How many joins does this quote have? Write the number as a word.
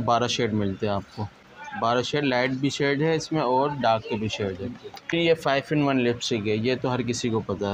two